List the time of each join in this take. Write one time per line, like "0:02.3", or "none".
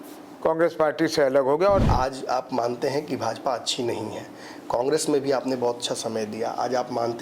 0:01.8